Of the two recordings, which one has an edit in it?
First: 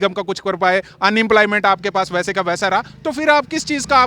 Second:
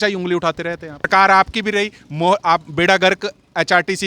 second; 1 cut; at 1.1 s

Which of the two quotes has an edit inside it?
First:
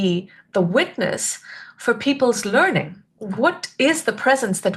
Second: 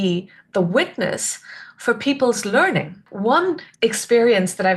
second; 1 cut; at 3.0 s

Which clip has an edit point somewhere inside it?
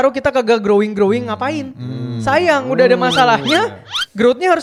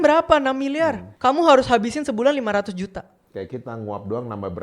second; 1 cut; at 1.1 s

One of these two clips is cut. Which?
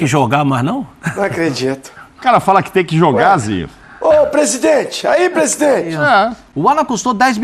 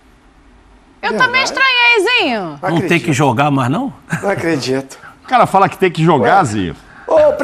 first; 1 cut; at 6.4 s

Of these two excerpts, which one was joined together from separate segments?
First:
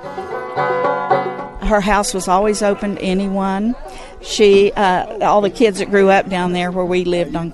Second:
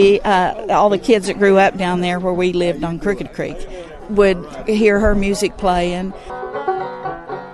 second; 2 cuts; at 4.0 s, 6.3 s

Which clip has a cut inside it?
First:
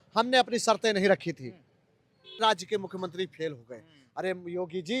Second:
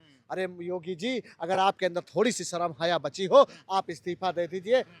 first; 1 cut; at 2.4 s

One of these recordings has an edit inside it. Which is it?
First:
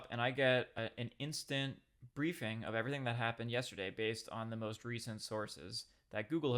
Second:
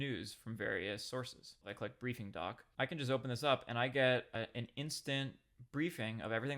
second; 2 cuts; at 1.7 s, 2.6 s

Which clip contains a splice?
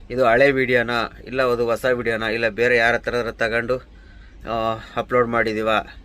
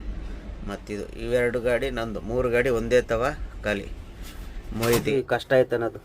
second; 1 cut; at 5.1 s

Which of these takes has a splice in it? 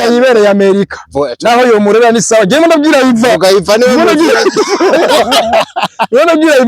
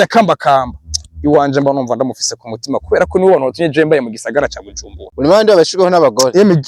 second; 1 cut; at 5.0 s

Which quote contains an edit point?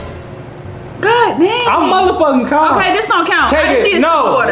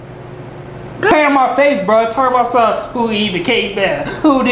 second; 1 cut; at 1.1 s

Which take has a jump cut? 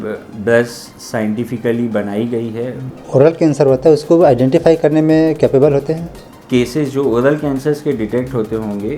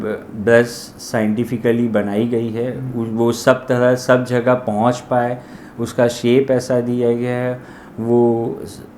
first; 2 cuts; at 3.0 s, 6.3 s

